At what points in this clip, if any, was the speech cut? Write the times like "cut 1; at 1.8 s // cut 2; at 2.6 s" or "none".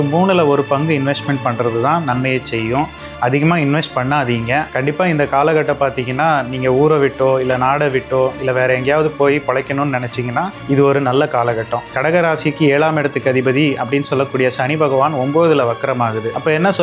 cut 1; at 4.7 s // cut 2; at 11.9 s